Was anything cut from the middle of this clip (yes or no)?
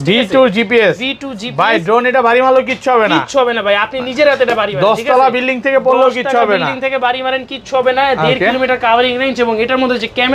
no